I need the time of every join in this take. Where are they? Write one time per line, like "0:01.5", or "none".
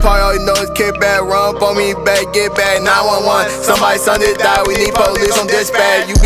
none